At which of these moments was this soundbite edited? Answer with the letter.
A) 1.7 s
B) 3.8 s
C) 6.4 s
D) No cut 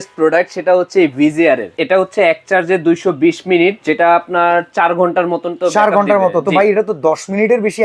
A